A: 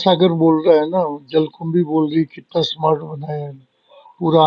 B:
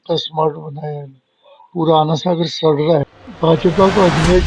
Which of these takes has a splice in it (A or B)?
B